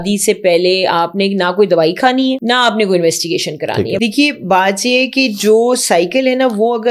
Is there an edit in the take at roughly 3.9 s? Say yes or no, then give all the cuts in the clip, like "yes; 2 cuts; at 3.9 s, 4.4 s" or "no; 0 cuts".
yes; 2 cuts; at 2.4 s, 3.9 s